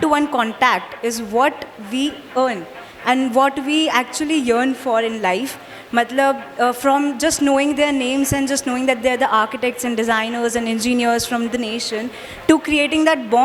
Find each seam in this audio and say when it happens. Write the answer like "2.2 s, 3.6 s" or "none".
none